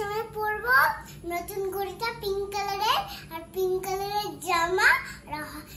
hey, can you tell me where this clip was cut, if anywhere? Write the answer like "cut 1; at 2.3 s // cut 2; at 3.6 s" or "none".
none